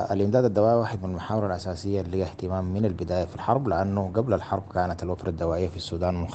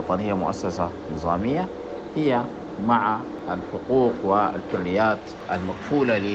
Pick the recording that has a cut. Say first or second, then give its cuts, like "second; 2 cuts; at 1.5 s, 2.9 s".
second; 2 cuts; at 3.3 s, 5.4 s